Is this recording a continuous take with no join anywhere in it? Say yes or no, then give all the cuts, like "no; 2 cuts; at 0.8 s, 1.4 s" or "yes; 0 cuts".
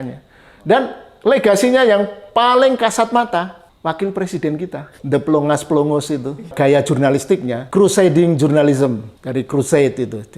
no; 5 cuts; at 3.6 s, 4.9 s, 6.5 s, 7.6 s, 9.1 s